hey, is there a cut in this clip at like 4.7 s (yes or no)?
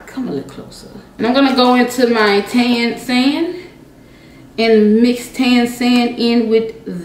no